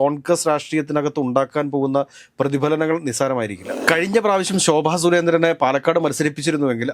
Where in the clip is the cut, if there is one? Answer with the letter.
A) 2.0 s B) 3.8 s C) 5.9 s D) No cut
B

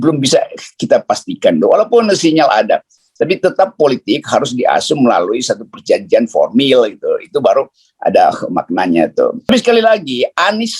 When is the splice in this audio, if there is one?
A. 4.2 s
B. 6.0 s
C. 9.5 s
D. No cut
C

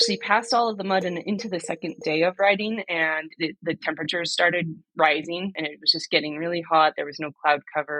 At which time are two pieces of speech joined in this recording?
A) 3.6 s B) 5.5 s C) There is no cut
B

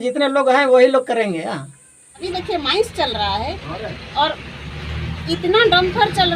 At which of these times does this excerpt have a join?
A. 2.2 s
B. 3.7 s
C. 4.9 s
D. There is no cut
A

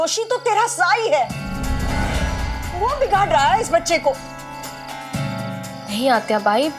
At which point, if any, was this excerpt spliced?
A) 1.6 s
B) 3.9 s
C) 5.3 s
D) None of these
A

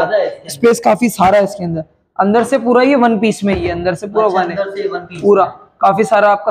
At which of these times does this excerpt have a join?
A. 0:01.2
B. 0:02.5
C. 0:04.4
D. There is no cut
D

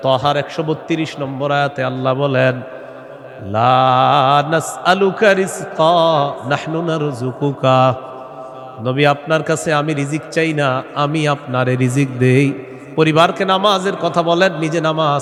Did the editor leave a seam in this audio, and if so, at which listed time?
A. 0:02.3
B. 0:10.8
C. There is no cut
C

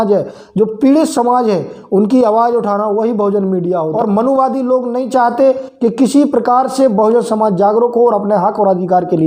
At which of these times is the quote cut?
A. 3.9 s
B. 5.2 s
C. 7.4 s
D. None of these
A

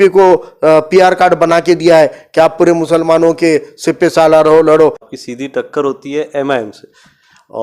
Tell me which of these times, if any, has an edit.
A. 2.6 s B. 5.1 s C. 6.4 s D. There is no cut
B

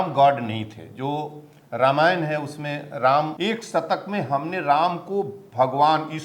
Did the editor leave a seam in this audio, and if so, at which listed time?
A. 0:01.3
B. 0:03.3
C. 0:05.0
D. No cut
B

